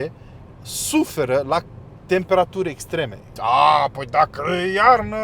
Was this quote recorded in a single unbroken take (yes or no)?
no